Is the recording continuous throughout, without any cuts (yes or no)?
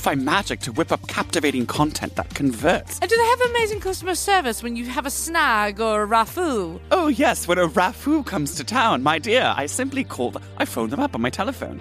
no